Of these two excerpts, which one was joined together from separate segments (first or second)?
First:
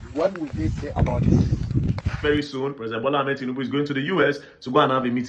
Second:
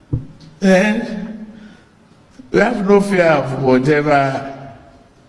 first